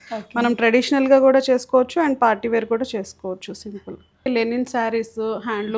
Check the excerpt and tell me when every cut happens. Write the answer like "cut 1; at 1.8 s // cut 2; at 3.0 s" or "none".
cut 1; at 4.3 s